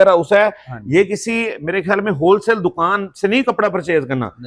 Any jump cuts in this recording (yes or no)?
no